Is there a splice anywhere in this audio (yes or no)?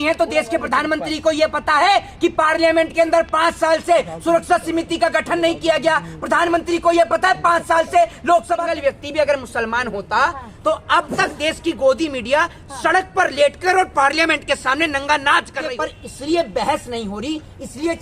yes